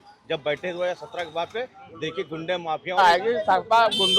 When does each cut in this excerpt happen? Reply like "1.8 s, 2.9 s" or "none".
3.0 s